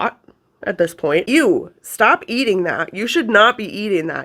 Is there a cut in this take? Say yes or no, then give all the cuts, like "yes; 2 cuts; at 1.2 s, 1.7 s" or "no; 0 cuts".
yes; 1 cut; at 1.2 s